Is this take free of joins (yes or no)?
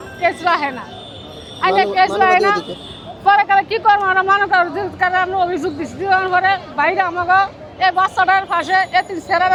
yes